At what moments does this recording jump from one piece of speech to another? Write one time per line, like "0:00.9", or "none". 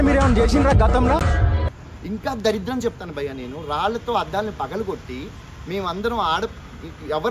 0:01.7